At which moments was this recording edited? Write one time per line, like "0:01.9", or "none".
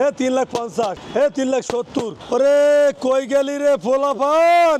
0:02.2